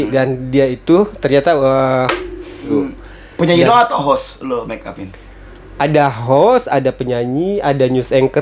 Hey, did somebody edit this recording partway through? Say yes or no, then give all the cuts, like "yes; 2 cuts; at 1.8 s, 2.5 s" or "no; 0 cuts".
yes; 1 cut; at 2.7 s